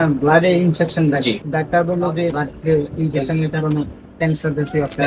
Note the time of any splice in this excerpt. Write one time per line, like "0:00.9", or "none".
0:01.4
0:02.4